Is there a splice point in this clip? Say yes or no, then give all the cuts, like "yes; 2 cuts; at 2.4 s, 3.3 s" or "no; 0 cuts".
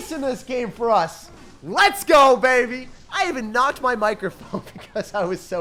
no; 0 cuts